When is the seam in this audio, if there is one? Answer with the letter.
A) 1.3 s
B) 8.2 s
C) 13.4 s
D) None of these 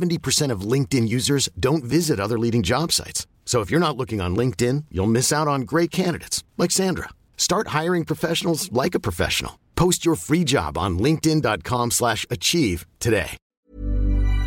C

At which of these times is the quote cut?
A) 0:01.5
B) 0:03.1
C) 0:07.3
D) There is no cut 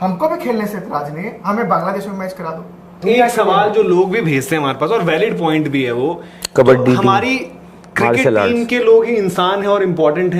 B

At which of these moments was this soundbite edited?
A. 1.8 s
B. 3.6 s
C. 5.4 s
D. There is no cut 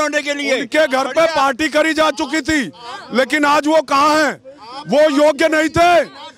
D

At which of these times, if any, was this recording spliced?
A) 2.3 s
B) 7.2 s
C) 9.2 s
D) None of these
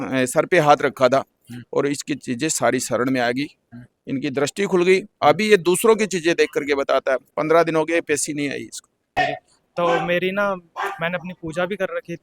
C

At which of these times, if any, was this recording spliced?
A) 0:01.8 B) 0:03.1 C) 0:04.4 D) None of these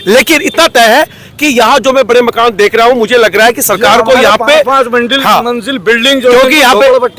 D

